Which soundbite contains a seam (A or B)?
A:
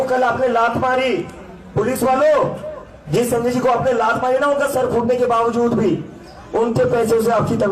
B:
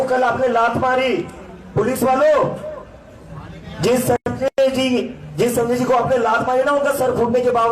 A